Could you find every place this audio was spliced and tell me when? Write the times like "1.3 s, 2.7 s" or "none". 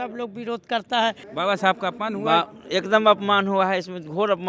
1.2 s